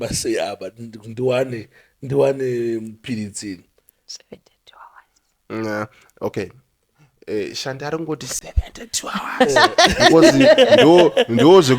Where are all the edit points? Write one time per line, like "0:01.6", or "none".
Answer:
none